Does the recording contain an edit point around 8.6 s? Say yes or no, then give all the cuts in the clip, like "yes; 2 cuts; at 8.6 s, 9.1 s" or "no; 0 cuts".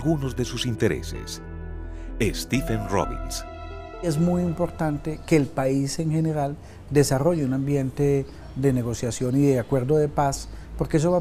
no; 1 cut; at 4.1 s